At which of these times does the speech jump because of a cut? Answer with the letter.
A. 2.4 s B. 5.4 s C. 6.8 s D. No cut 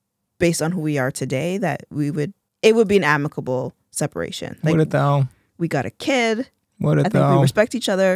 A